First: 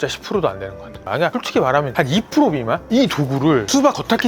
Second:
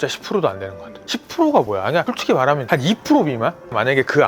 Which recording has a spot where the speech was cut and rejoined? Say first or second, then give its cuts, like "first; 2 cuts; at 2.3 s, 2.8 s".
first; 2 cuts; at 1.1 s, 2.8 s